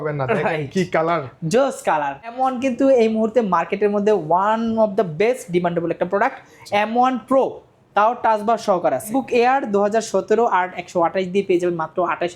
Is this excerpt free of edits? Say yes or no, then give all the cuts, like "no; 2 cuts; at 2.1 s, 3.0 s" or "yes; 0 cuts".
no; 2 cuts; at 2.3 s, 9.1 s